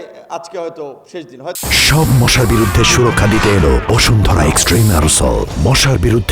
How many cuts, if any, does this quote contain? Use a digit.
0